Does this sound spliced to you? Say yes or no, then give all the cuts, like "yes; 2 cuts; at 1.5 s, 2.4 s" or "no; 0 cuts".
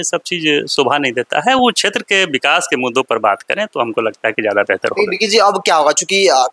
no; 0 cuts